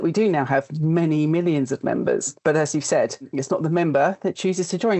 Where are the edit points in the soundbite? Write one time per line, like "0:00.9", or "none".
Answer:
0:03.2